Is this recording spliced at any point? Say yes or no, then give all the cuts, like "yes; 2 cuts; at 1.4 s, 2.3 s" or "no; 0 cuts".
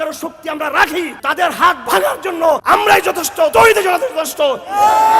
yes; 3 cuts; at 1.2 s, 2.6 s, 3.5 s